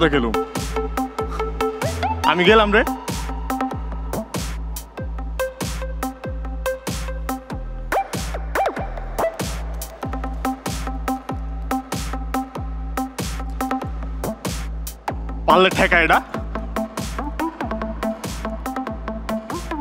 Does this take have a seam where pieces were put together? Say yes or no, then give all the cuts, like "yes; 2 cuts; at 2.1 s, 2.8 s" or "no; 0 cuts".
no; 0 cuts